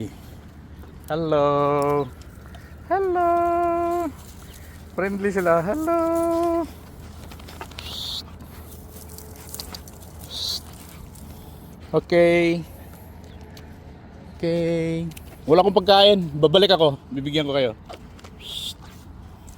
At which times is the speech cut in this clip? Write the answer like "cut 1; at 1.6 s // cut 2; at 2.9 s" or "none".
none